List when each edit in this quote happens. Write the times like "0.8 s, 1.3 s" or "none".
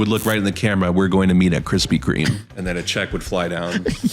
2.5 s